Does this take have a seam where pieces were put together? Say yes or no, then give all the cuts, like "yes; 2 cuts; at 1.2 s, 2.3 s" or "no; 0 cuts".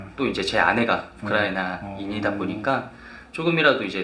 no; 0 cuts